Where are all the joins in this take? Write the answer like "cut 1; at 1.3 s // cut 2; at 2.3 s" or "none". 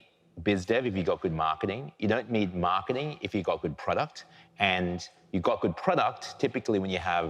none